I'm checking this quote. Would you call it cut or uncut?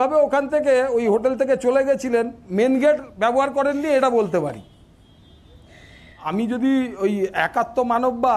cut